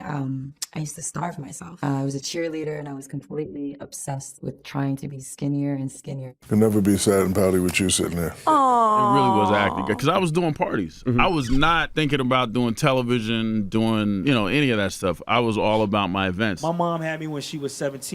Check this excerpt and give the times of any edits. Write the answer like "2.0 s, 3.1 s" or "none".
6.2 s, 9.2 s, 16.6 s